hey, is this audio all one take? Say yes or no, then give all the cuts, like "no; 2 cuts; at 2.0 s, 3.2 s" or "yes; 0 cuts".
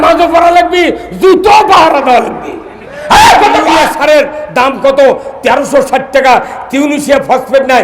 no; 1 cut; at 3.8 s